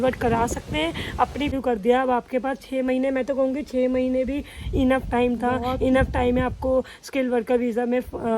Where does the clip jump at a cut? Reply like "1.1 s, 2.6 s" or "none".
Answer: 1.5 s

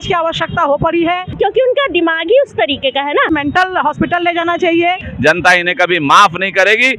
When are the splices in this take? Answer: 1.3 s, 3.3 s, 5.1 s

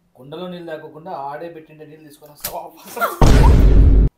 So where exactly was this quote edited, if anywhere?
3.1 s

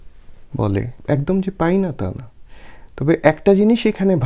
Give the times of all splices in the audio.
0.9 s

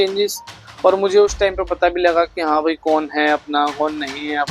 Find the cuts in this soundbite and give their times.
none

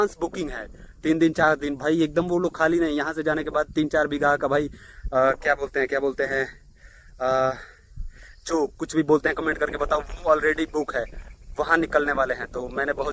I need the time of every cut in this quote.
none

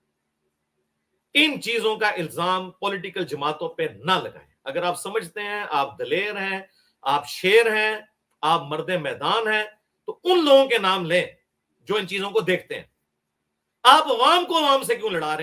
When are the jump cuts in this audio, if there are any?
none

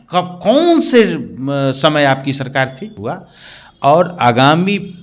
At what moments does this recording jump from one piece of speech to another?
2.9 s

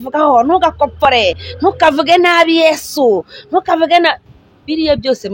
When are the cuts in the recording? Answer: none

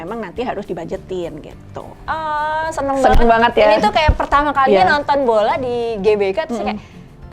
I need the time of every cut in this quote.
2.0 s

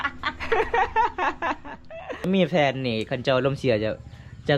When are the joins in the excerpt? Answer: 2.3 s

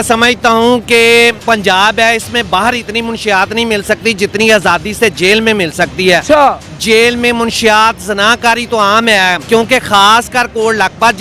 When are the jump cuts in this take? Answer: 1.4 s, 6.7 s, 9.4 s

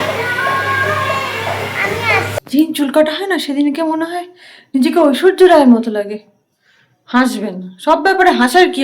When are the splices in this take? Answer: 2.4 s

